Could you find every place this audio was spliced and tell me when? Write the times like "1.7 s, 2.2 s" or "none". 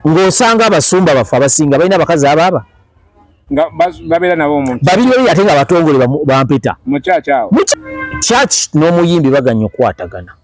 7.7 s